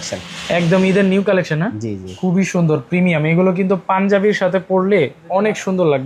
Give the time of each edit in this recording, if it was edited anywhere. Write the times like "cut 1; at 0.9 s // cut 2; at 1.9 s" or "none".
none